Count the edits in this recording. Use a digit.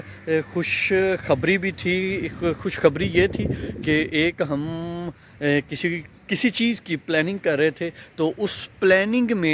1